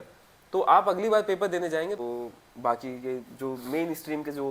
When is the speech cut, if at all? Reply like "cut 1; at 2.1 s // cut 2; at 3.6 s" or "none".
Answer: cut 1; at 2.0 s